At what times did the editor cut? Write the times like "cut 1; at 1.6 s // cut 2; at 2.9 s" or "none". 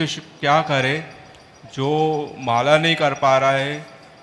none